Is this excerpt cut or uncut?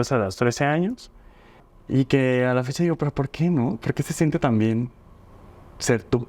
cut